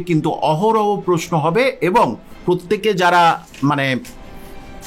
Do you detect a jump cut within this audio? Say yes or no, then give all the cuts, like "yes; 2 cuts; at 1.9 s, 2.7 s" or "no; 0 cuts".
no; 0 cuts